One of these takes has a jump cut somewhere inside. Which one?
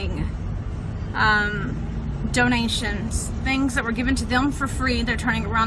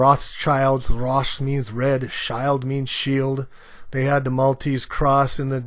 second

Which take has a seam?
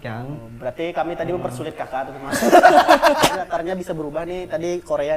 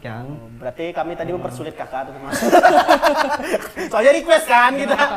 first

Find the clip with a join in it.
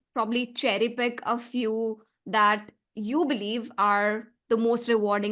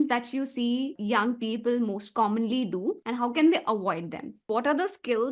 second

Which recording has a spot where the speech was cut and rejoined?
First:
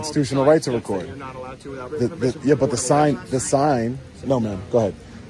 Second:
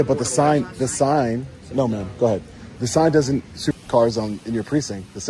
second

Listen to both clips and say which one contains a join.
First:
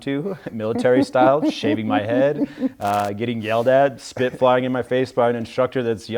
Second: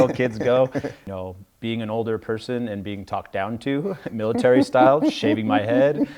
second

